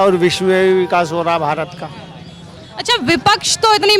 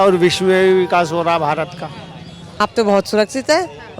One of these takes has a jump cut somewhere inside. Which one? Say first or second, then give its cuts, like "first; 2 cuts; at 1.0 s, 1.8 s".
second; 1 cut; at 2.5 s